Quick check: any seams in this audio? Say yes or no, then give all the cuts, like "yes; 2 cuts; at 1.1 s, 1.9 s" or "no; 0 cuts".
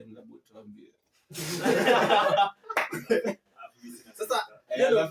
no; 0 cuts